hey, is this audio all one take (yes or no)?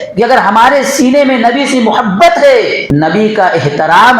no